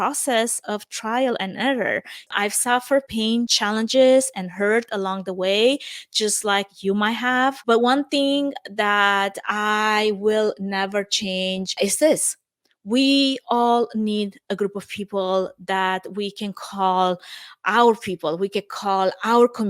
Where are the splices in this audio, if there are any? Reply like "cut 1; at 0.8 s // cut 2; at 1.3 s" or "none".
cut 1; at 2.1 s // cut 2; at 3.2 s